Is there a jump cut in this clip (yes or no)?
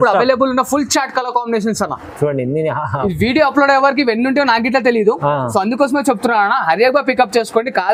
no